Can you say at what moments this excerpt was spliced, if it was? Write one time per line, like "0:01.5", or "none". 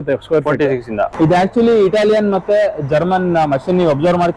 0:01.0